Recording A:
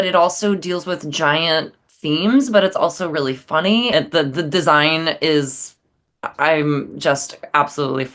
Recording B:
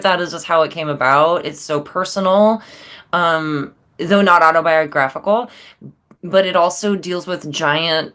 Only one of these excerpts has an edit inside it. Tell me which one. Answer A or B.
A